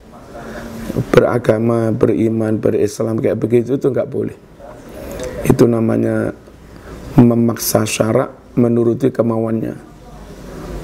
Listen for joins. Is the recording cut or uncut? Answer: uncut